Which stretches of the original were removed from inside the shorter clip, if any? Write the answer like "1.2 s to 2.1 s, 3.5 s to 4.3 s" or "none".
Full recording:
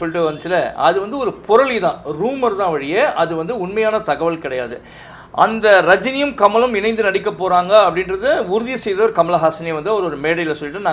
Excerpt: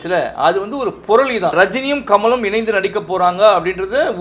1.9 s to 5.8 s